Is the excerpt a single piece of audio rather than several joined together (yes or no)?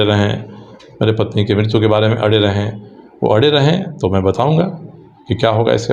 yes